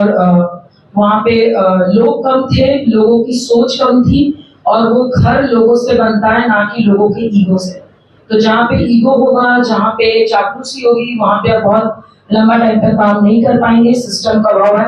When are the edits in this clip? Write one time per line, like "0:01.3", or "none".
none